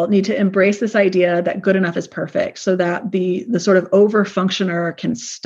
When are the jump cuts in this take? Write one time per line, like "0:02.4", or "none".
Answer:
none